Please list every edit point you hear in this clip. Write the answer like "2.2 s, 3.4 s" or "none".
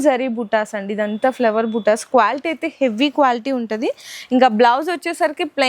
none